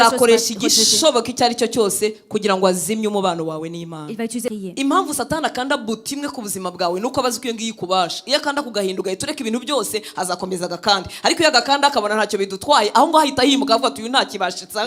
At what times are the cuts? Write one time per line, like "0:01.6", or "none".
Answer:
0:04.5